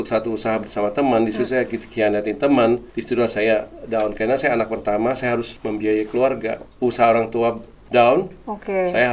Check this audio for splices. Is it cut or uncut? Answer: cut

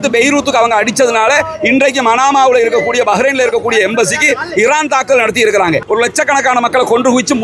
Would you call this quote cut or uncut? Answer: cut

